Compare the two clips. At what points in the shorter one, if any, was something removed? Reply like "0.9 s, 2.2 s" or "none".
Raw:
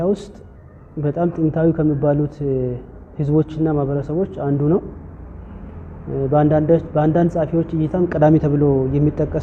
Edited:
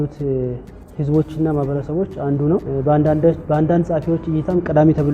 2.7 s